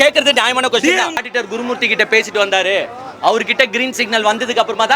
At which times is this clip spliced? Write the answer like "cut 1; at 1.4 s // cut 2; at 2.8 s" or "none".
cut 1; at 1.2 s